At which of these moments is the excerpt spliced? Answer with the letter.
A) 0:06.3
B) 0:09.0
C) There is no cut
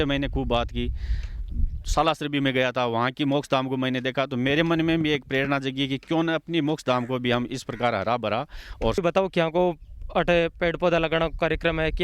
B